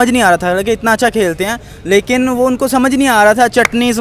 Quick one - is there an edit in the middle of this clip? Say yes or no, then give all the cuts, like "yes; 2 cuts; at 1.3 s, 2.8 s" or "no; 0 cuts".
no; 0 cuts